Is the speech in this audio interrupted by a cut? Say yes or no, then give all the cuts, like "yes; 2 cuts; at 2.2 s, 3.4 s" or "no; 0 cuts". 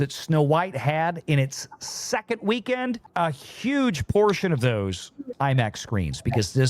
yes; 2 cuts; at 3.1 s, 5.3 s